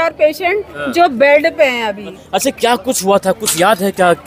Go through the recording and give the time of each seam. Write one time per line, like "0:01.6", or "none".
0:02.2